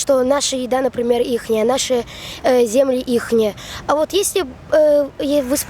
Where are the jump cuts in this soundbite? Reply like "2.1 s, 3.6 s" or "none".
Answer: none